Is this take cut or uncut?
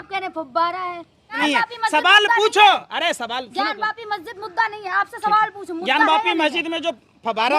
cut